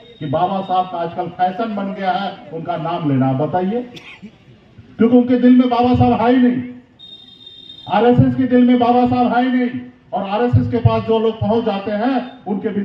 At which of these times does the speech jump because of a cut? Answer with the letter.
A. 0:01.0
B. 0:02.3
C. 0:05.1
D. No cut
D